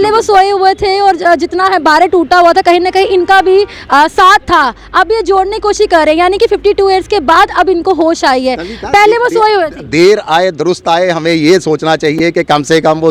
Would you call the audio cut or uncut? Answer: uncut